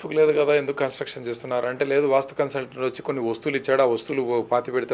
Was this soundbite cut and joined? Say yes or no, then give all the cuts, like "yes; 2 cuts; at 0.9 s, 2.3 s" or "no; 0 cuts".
no; 0 cuts